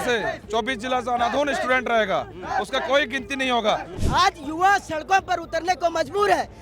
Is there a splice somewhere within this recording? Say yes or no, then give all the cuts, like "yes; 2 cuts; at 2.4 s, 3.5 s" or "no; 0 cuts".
yes; 1 cut; at 3.9 s